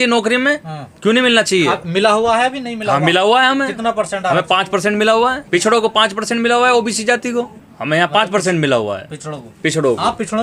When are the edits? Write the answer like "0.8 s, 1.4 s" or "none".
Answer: none